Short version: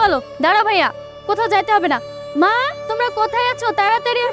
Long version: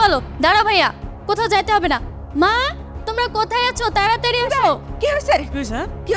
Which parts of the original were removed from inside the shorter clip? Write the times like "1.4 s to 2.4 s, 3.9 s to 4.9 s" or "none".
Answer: 2.8 s to 3.0 s